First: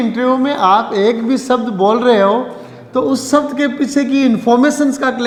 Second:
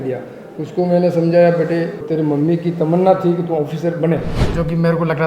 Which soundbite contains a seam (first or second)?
second